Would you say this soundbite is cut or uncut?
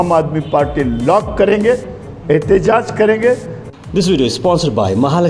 cut